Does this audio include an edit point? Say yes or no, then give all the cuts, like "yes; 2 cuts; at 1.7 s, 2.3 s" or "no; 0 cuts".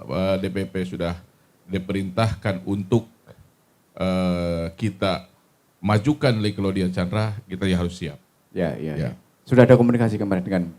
no; 0 cuts